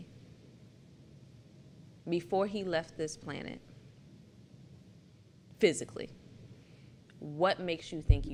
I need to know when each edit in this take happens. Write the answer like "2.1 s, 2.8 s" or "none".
none